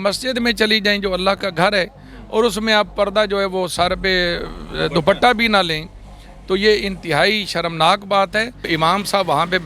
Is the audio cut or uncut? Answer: cut